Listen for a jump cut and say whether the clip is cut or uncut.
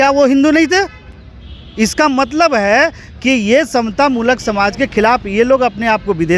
uncut